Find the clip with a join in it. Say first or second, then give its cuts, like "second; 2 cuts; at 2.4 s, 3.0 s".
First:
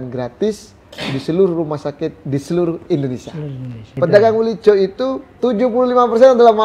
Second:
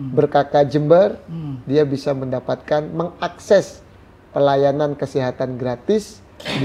first; 1 cut; at 3.8 s